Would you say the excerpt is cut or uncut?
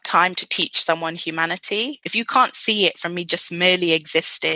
cut